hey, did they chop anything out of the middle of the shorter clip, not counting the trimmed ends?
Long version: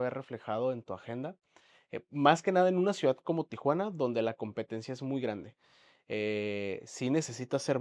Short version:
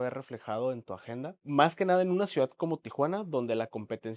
yes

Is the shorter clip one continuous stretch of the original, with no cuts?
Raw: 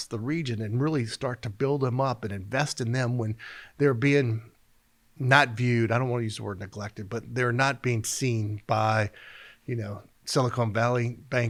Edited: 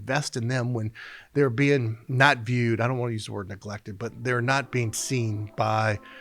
no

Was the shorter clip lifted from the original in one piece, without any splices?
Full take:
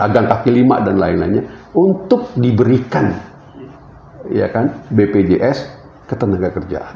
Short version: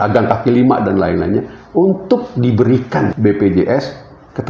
no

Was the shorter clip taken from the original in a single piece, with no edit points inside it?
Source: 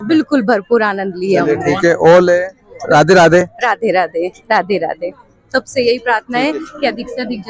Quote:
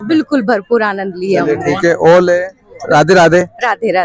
yes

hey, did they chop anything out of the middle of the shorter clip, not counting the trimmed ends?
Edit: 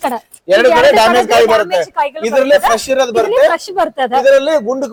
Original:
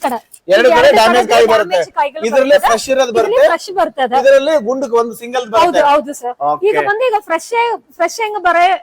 no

